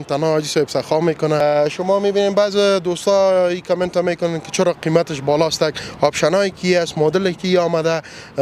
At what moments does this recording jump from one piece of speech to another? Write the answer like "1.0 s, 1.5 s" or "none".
1.4 s

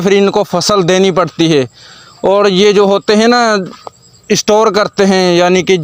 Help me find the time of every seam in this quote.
none

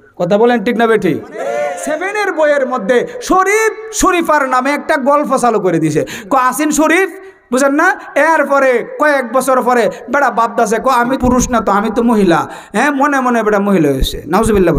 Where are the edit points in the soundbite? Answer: 1.8 s, 11.2 s

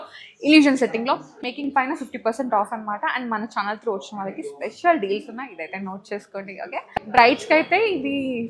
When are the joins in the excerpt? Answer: 1.3 s, 7.2 s

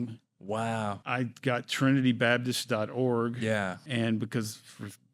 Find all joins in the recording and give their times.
1.0 s, 3.8 s

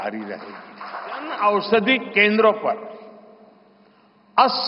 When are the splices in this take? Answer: 1.3 s

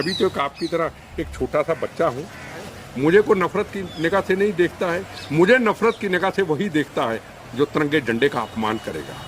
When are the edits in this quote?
2.7 s

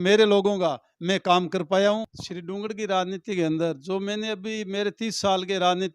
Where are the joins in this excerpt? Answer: 2.1 s

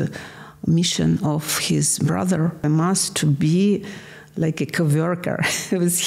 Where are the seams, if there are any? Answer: 2.6 s

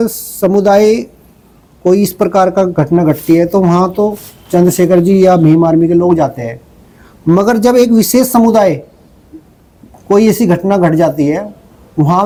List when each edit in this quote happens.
none

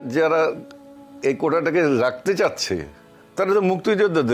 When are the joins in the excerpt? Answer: none

